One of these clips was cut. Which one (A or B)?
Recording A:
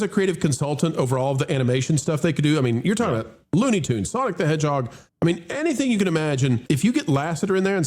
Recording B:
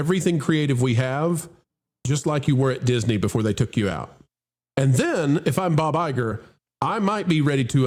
A